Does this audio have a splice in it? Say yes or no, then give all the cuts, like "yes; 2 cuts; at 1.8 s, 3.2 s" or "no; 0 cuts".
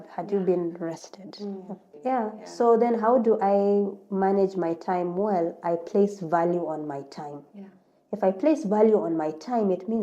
yes; 1 cut; at 1.8 s